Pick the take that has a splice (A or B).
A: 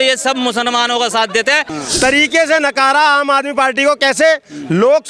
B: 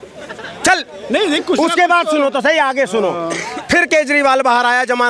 A